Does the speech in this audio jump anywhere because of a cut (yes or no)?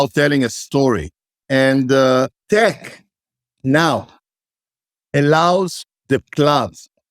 yes